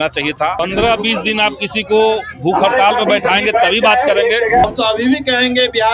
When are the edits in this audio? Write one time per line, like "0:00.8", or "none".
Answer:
0:04.7